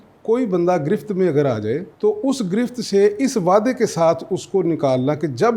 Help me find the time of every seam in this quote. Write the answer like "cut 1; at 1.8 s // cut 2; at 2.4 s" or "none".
cut 1; at 1.9 s